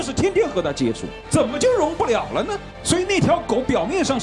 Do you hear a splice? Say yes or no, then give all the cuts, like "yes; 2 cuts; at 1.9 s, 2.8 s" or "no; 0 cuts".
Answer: no; 0 cuts